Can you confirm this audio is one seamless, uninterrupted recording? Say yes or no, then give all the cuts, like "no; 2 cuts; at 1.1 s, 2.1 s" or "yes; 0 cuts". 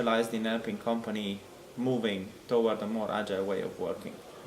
yes; 0 cuts